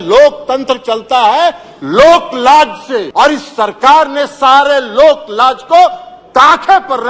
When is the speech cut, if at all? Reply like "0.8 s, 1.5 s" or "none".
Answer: 3.1 s